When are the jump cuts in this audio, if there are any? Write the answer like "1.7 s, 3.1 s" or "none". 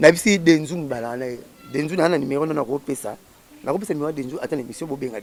none

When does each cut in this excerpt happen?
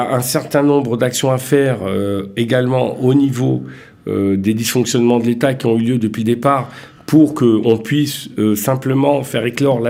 none

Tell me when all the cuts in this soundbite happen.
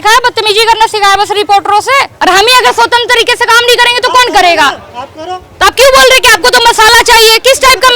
2.2 s

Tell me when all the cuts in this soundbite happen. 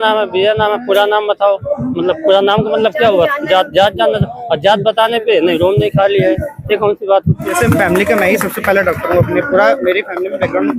7.5 s

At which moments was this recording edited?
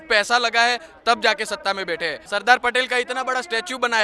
2.2 s

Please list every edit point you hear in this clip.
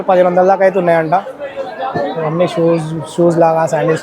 none

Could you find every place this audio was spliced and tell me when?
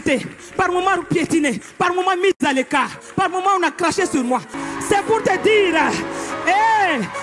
4.5 s

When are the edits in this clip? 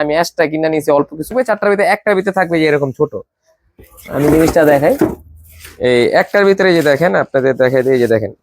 1.3 s

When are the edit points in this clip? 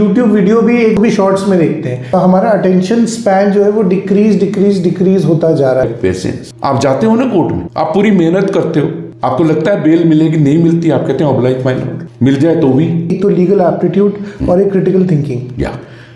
1.0 s, 2.1 s, 5.8 s, 13.2 s

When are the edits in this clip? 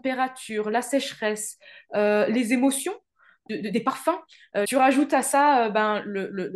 3.4 s, 4.7 s

